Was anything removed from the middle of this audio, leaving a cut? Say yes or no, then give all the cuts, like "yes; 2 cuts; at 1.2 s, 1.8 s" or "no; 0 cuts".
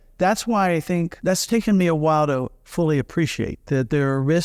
yes; 1 cut; at 1.1 s